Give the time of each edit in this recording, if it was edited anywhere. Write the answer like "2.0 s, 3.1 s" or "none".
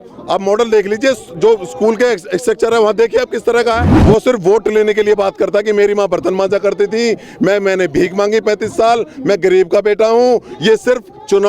3.9 s